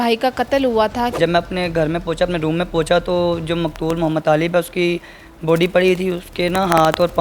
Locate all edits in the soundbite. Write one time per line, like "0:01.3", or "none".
0:01.1